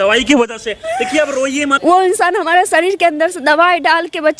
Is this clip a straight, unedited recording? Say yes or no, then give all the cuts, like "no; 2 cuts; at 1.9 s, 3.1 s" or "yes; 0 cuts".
no; 1 cut; at 1.8 s